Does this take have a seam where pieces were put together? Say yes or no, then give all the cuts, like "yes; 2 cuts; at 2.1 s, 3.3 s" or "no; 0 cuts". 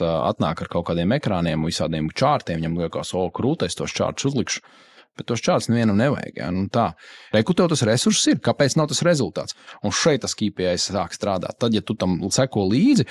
yes; 1 cut; at 7.2 s